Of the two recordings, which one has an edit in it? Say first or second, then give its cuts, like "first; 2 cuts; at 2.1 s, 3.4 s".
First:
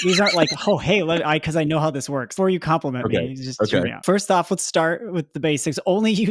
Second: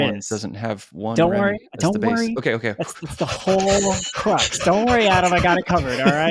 first; 2 cuts; at 2.3 s, 4.0 s